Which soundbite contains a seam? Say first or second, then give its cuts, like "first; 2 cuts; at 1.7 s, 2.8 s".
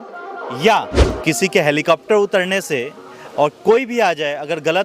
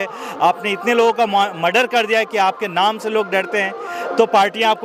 first; 1 cut; at 1.1 s